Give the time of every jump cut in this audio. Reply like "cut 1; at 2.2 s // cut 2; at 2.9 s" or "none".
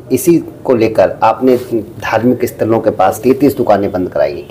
cut 1; at 3.2 s